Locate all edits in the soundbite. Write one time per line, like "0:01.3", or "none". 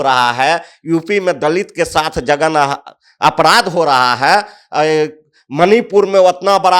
none